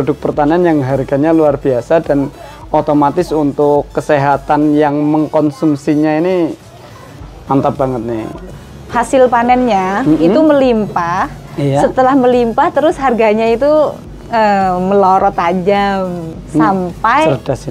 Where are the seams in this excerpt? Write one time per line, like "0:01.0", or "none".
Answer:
0:08.5

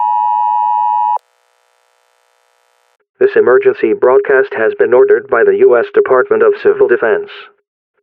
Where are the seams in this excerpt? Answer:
0:01.1

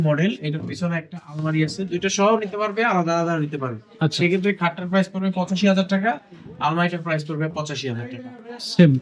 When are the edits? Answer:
none

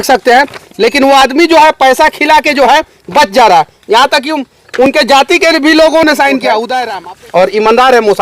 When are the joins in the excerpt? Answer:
0:06.8

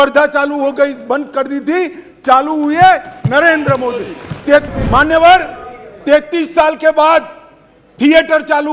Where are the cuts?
0:04.7

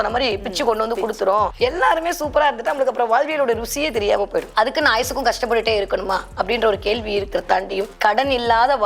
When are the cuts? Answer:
0:01.5
0:04.5

